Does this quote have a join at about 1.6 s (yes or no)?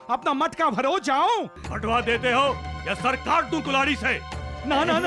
yes